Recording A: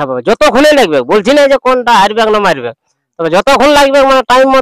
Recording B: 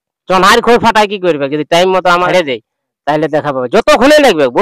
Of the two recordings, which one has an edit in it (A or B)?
B